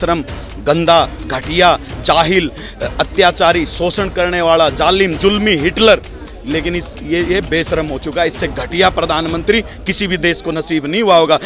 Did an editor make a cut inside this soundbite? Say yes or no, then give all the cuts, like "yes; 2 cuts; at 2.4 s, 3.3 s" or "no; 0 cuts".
no; 0 cuts